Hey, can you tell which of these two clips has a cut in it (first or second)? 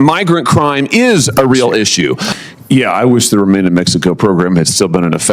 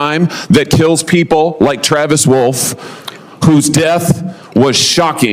first